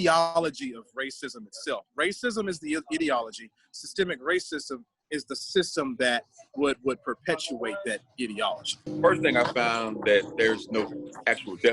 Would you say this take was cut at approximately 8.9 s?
yes; 1 cut; at 8.9 s

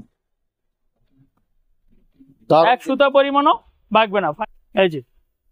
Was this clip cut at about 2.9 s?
no; 1 cut; at 4.3 s

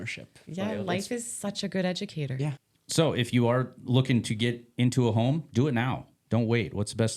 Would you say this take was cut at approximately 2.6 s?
yes; 1 cut; at 2.6 s

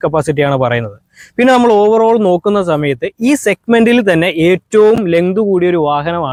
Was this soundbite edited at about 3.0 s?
no; 0 cuts

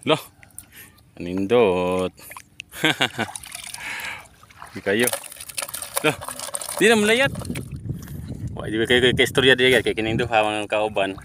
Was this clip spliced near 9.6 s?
no; 1 cut; at 7.4 s

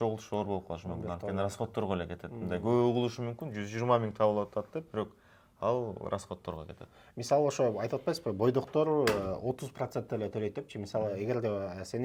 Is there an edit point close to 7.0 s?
no; 0 cuts

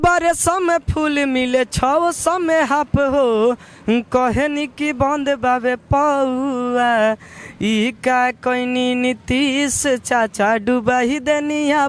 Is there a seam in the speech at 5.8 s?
no; 0 cuts

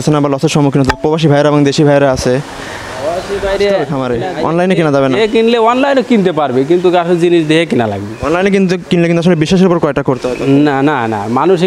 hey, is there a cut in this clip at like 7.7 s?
no; 1 cut; at 4.0 s

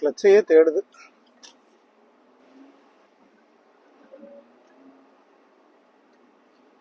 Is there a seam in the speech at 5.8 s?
no; 1 cut; at 3.0 s

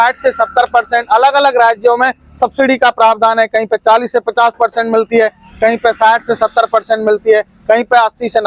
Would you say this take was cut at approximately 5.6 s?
no; 0 cuts

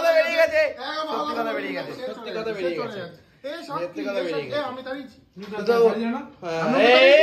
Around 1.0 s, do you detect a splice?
no; 0 cuts

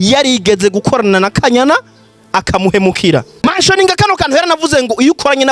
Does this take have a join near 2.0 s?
no; 1 cut; at 3.4 s

